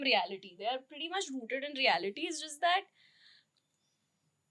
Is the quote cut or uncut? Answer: uncut